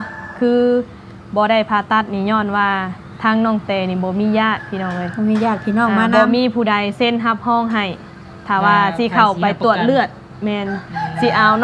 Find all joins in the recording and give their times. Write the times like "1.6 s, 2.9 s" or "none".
none